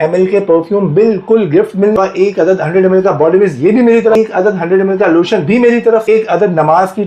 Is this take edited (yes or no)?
yes